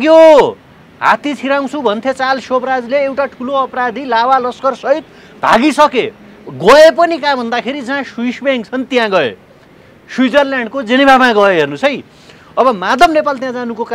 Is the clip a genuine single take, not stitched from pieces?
yes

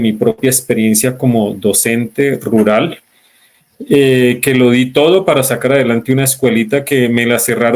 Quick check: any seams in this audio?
no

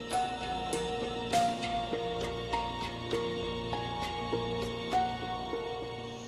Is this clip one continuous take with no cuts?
yes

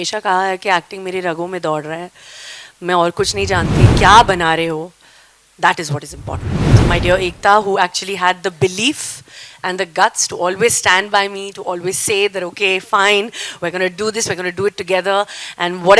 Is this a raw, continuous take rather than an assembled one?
no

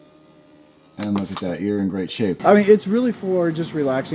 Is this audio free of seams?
no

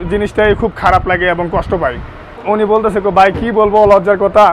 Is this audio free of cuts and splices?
no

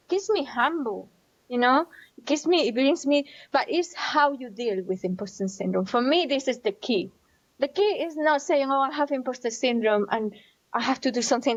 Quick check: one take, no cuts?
yes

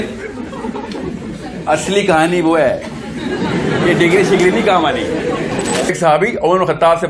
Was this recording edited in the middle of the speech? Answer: yes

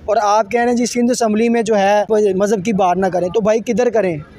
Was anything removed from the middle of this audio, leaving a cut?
yes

